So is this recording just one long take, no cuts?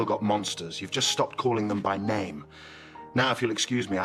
yes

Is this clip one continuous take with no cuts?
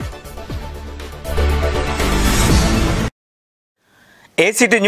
yes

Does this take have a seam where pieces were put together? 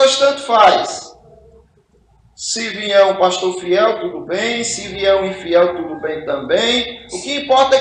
no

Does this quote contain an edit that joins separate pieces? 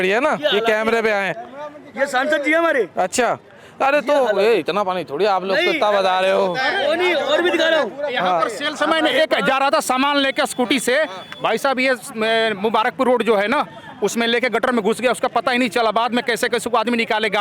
no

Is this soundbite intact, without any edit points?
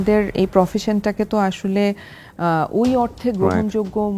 yes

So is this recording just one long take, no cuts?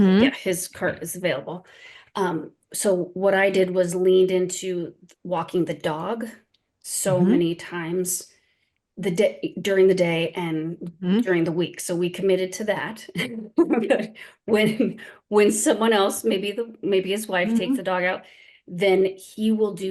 yes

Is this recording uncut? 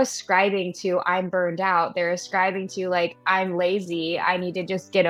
yes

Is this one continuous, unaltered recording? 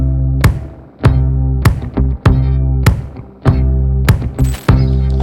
yes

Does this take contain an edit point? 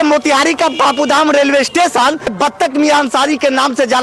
yes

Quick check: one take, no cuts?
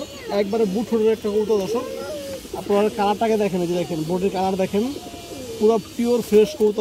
yes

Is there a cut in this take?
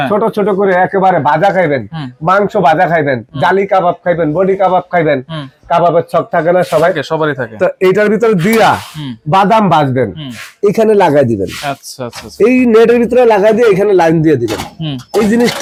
no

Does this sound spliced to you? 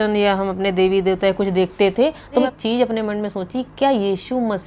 yes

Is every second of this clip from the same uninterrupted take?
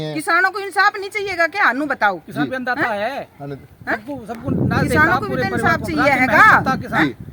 yes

